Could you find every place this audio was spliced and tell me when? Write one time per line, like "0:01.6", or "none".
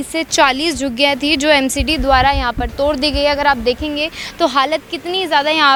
none